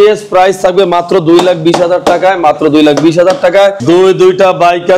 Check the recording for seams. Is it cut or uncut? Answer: cut